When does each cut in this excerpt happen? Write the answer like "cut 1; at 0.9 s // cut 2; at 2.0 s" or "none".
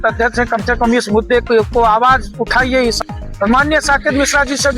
cut 1; at 3.0 s